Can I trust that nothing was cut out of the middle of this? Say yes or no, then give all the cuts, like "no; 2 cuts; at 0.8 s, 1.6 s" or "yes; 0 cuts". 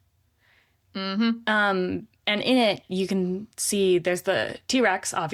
yes; 0 cuts